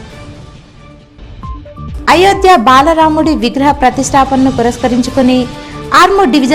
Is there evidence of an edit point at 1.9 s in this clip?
yes; 1 cut; at 1.9 s

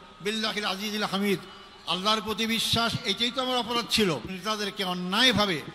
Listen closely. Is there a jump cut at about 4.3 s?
yes; 1 cut; at 4.3 s

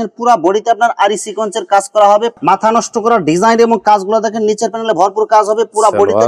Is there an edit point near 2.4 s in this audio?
yes; 1 cut; at 2.4 s

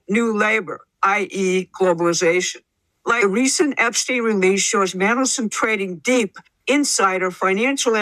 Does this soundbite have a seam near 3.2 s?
yes; 1 cut; at 3.2 s

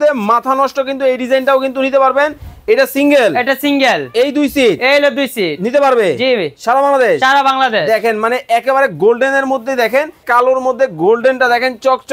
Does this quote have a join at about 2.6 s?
no; 1 cut; at 10.2 s

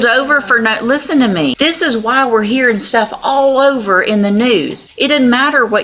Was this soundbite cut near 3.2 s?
no; 2 cuts; at 1.5 s, 4.8 s

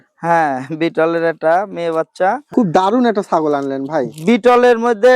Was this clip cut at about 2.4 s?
yes; 1 cut; at 2.4 s

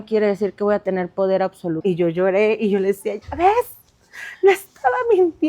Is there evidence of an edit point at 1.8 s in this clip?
yes; 1 cut; at 1.8 s

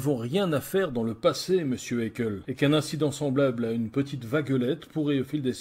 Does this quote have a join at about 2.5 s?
yes; 1 cut; at 2.5 s

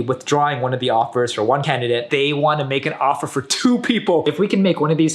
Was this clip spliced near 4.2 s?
yes; 2 cuts; at 2.1 s, 4.2 s

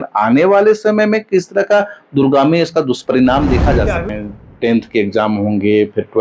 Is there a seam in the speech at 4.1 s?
yes; 1 cut; at 4.1 s

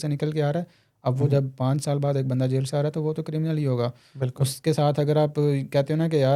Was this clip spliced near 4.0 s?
no; 0 cuts

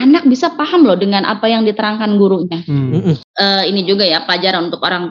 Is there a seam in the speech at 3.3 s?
yes; 1 cut; at 3.3 s

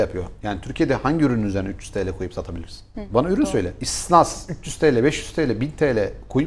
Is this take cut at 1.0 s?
no; 1 cut; at 3.1 s

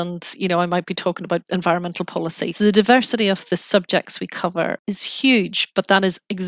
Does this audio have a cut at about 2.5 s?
yes; 3 cuts; at 1.4 s, 2.5 s, 4.8 s

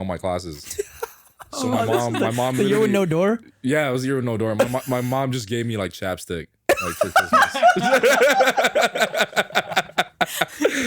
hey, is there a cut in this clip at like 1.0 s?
no; 0 cuts

